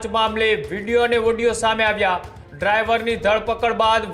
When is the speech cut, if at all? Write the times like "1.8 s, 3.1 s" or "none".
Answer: none

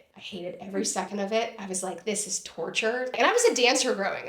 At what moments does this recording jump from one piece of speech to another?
3.2 s

